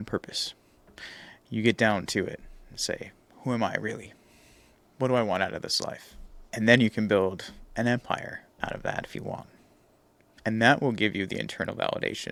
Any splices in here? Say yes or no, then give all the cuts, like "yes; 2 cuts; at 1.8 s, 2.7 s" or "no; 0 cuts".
no; 0 cuts